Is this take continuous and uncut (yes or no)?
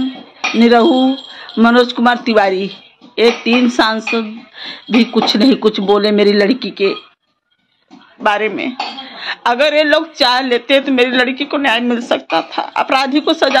yes